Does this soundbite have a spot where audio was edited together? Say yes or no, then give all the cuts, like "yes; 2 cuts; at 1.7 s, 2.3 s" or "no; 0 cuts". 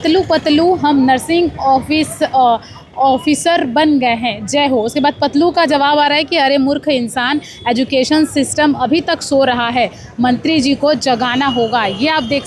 no; 0 cuts